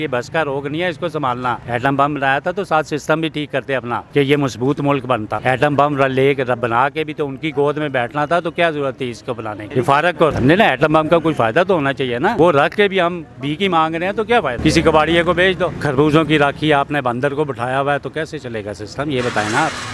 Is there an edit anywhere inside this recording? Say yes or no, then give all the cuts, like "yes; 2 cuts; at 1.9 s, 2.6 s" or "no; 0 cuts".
yes; 8 cuts; at 1.6 s, 4.0 s, 5.3 s, 9.6 s, 10.3 s, 12.3 s, 14.6 s, 15.8 s